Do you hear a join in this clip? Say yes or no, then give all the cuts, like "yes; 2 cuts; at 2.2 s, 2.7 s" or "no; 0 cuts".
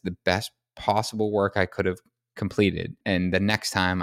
yes; 1 cut; at 3.0 s